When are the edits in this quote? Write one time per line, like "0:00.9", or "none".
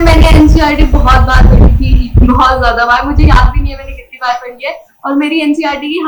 none

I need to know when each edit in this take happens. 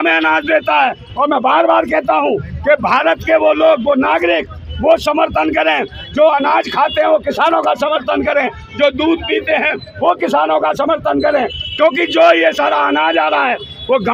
none

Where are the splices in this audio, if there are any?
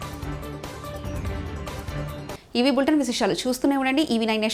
none

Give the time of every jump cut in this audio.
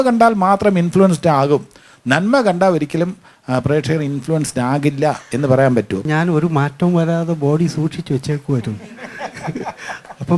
0:06.0

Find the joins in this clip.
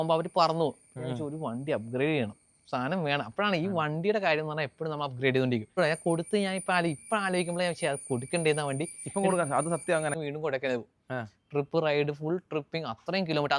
0:05.8
0:10.1

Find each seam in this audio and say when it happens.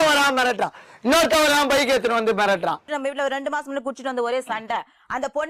0:02.8

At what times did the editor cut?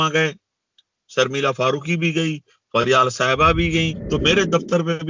0:04.0

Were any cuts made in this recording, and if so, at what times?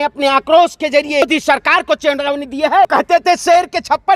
0:01.2
0:02.9

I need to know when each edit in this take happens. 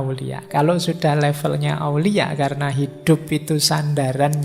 none

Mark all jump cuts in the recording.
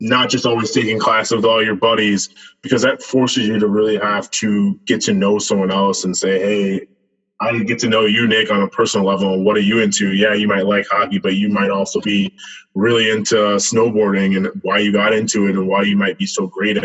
none

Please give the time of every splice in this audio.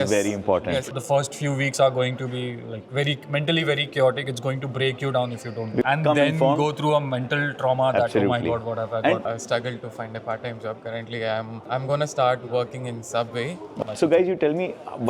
0:00.9
0:05.9
0:09.2
0:13.8

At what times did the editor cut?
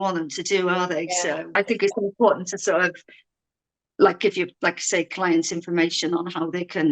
0:01.6

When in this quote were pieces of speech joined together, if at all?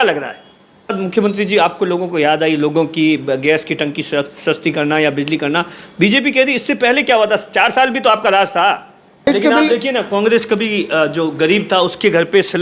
0:01.0
0:09.3

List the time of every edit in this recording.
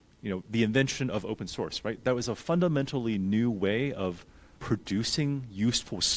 0:04.5

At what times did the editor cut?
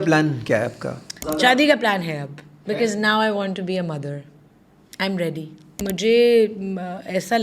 0:01.5
0:05.8

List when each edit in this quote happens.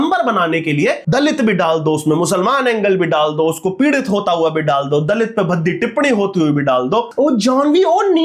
0:01.0
0:07.1

